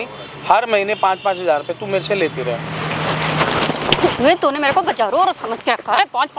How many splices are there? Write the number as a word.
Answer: zero